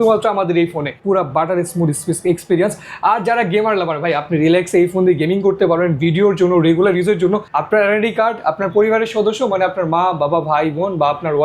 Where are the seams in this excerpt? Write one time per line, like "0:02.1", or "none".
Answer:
0:01.0
0:07.5